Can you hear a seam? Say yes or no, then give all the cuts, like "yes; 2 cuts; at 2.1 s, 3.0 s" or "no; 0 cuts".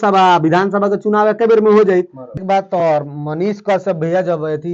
yes; 1 cut; at 2.3 s